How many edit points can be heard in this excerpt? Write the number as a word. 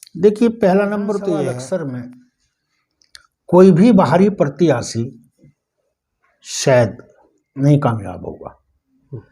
one